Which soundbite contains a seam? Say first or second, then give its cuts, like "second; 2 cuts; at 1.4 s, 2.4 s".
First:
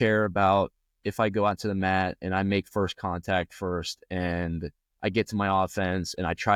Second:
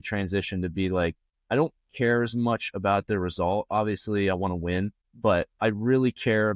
second; 2 cuts; at 1.3 s, 5.0 s